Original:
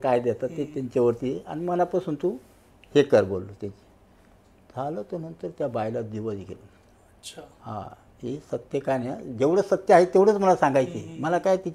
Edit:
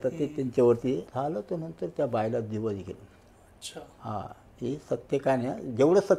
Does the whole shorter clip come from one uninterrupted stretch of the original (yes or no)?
no